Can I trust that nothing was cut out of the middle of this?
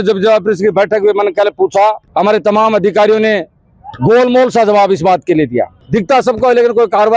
no; 2 cuts; at 2.0 s, 5.8 s

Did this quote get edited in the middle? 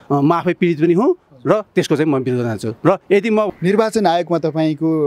yes; 1 cut; at 3.5 s

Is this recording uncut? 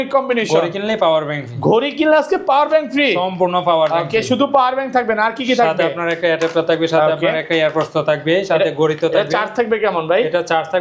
yes; 0 cuts

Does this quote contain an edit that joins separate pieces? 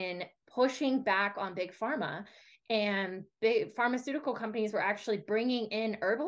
no; 0 cuts

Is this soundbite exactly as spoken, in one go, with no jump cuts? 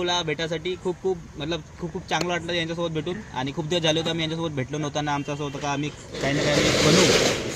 yes; 0 cuts

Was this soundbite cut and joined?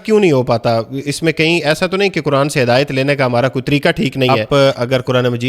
yes; 1 cut; at 4.4 s

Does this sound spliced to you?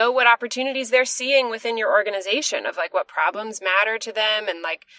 no; 0 cuts

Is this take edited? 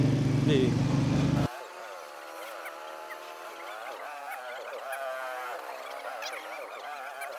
no; 0 cuts

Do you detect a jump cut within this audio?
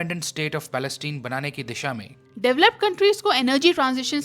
yes; 1 cut; at 2.1 s

